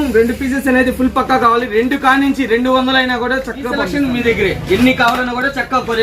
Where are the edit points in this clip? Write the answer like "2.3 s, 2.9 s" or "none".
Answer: 3.8 s